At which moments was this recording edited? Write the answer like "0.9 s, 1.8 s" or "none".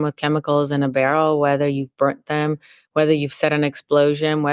none